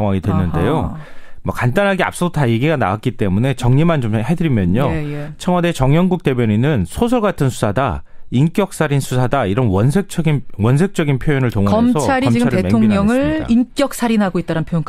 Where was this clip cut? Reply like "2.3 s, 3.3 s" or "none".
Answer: none